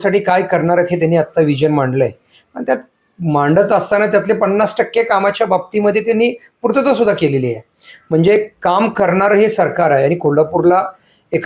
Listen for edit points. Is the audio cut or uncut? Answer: uncut